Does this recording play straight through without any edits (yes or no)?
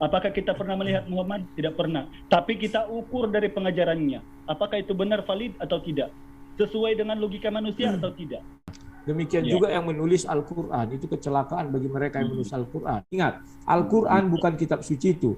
no